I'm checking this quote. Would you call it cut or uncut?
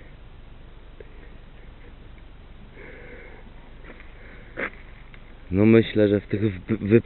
cut